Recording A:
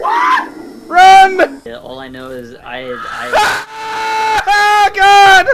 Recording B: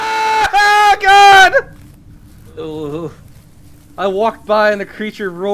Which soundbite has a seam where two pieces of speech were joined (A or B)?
A